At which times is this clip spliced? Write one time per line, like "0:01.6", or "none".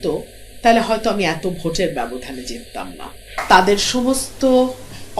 0:03.3